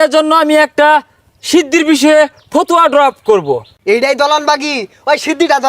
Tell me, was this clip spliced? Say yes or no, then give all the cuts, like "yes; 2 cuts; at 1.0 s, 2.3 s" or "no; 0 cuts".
yes; 1 cut; at 3.7 s